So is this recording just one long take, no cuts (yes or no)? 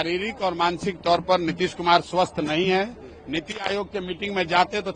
yes